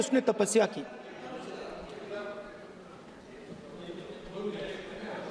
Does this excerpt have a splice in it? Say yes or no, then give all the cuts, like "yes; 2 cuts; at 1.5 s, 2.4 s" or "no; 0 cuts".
no; 0 cuts